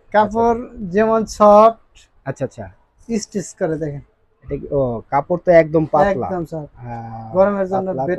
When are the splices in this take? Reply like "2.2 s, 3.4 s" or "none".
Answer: none